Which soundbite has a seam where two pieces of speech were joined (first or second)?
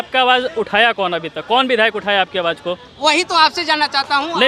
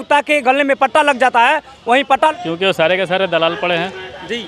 second